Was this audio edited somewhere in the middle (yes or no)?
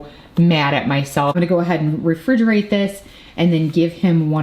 yes